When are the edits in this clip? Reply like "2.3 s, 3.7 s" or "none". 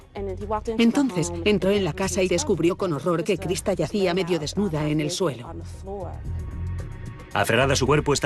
2.4 s